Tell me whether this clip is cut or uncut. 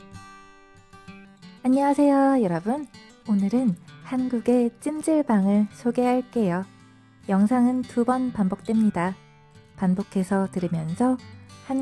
cut